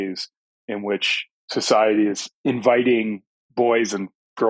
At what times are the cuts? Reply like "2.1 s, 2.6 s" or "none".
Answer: 2.3 s